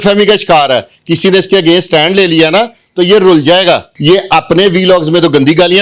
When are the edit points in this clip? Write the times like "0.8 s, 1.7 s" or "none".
3.9 s